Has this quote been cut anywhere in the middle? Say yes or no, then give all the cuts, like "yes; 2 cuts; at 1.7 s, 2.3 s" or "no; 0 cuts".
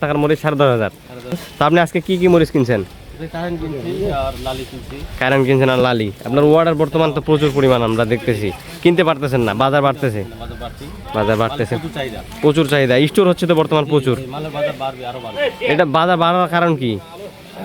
yes; 1 cut; at 1.5 s